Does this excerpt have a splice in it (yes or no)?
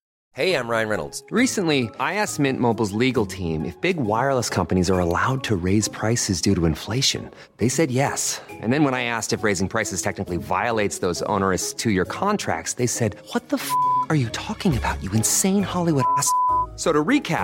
no